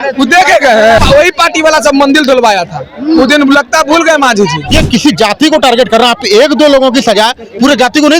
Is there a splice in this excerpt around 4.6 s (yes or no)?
yes